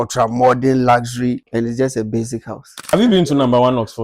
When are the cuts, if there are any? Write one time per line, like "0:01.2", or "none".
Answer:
0:01.4
0:02.8